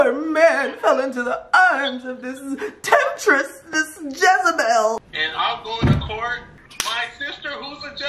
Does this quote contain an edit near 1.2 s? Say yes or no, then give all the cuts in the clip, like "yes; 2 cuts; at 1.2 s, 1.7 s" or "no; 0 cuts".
no; 2 cuts; at 5.0 s, 6.4 s